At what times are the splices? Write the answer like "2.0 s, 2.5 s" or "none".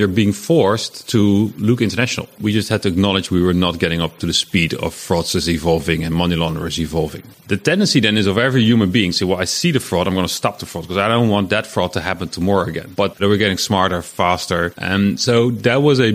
2.4 s, 7.2 s, 13.0 s, 14.8 s